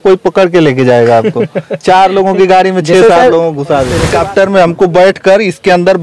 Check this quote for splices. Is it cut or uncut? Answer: cut